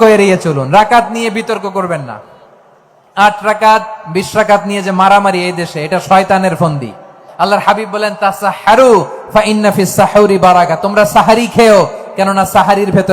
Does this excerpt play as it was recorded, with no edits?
no; 1 cut; at 7.2 s

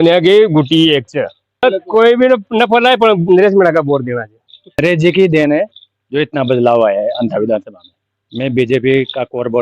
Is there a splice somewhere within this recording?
yes; 2 cuts; at 1.6 s, 4.8 s

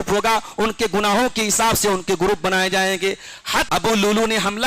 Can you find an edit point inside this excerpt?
yes; 1 cut; at 3.7 s

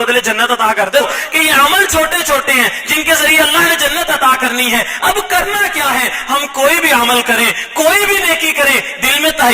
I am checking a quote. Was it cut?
yes; 1 cut; at 1.0 s

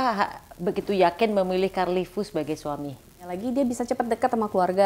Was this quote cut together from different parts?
yes; 1 cut; at 3.3 s

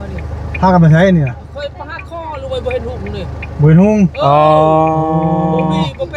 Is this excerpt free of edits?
yes; 0 cuts

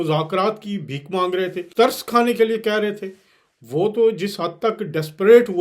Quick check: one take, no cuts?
yes; 0 cuts

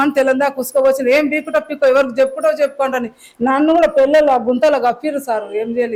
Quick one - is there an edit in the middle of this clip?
no; 0 cuts

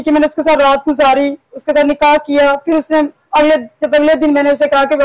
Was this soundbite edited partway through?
no; 0 cuts

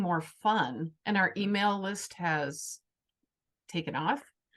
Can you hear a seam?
yes; 1 cut; at 0.9 s

